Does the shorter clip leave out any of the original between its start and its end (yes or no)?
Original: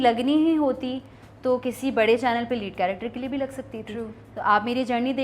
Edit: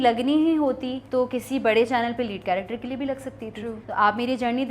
yes